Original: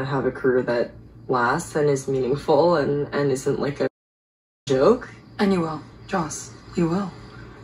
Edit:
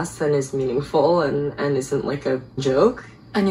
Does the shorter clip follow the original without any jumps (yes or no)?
no